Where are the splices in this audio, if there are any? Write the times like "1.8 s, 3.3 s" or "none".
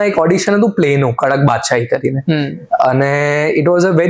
none